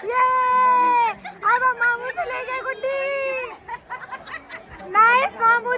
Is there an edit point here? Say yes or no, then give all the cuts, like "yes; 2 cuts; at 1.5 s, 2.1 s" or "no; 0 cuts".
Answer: no; 0 cuts